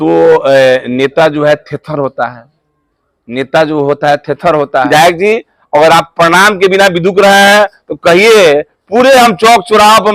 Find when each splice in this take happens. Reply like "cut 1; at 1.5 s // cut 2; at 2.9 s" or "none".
cut 1; at 4.9 s